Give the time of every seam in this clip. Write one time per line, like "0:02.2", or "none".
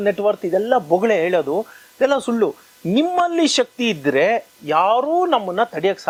none